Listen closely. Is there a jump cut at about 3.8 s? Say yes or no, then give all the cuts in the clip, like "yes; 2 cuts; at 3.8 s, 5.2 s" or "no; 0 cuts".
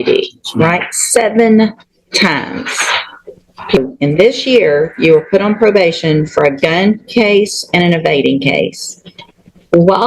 yes; 1 cut; at 3.8 s